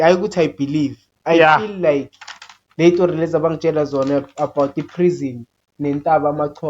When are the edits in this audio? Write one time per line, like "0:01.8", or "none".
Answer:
none